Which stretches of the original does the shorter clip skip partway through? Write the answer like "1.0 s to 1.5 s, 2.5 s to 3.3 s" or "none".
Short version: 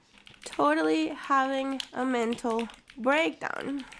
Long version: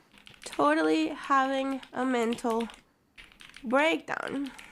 2.8 s to 3.5 s